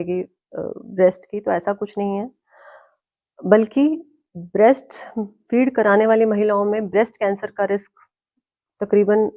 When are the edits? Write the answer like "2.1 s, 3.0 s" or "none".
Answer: none